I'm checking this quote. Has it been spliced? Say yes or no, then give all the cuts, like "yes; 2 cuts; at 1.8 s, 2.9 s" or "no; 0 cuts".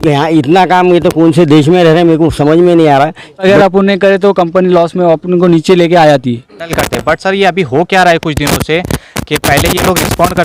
yes; 2 cuts; at 3.4 s, 6.7 s